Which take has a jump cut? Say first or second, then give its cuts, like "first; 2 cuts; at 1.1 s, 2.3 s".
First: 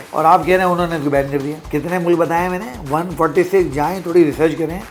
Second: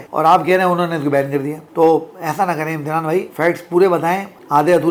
first; 1 cut; at 1.6 s